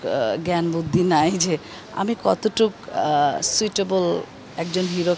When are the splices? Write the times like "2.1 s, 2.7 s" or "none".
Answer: none